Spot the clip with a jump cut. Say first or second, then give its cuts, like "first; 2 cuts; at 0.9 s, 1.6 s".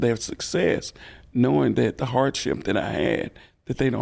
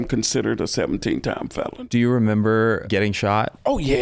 second; 2 cuts; at 1.8 s, 3.0 s